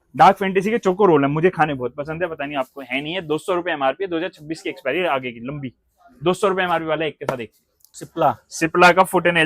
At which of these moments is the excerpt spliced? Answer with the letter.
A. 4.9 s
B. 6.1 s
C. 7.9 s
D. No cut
C